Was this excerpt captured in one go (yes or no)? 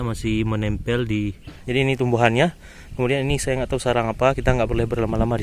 no